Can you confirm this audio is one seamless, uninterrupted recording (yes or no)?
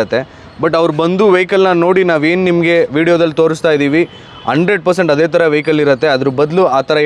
yes